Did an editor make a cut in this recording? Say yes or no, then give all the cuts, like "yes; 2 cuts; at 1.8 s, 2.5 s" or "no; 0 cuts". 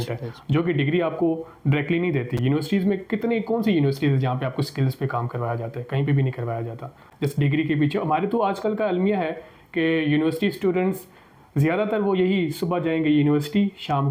no; 0 cuts